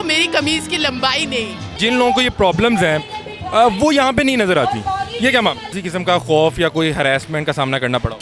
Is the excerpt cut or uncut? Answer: cut